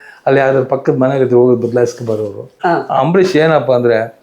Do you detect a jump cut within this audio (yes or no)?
yes